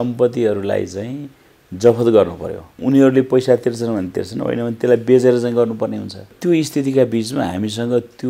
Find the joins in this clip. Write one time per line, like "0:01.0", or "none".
0:02.8
0:06.3

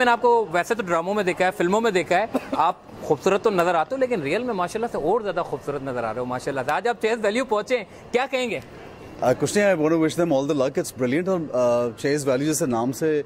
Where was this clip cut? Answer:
none

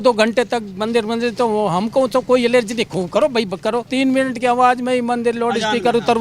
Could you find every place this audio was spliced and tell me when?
0:03.9

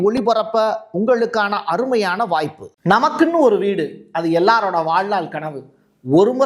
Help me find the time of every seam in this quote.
0:02.7

